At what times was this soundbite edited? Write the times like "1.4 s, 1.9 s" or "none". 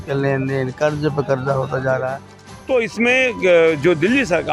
2.5 s